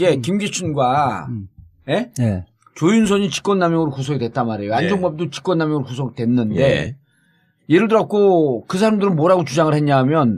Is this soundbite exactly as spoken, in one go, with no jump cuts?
no; 1 cut; at 6.2 s

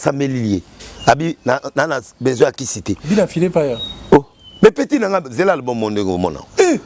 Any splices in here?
no; 0 cuts

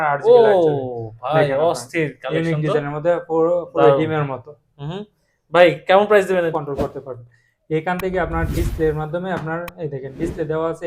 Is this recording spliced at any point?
yes; 1 cut; at 6.5 s

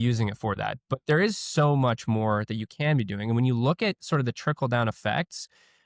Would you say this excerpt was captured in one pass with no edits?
yes; 0 cuts

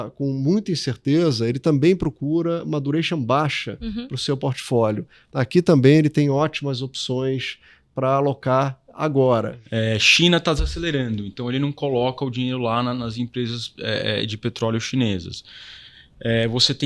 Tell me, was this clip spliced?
yes; 1 cut; at 9.6 s

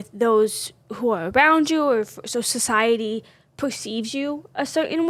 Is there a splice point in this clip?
no; 0 cuts

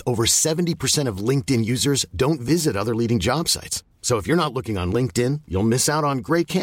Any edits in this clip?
no; 0 cuts

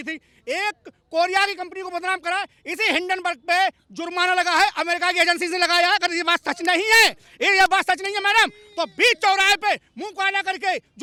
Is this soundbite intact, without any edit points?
yes; 0 cuts

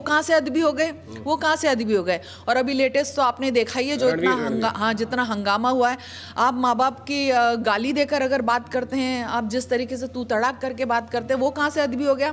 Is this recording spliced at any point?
no; 0 cuts

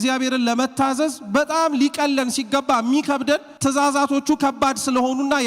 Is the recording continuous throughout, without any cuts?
no; 1 cut; at 3.5 s

